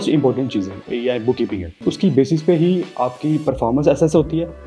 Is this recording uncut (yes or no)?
no